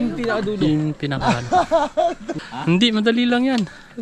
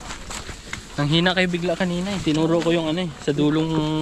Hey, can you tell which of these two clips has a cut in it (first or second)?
first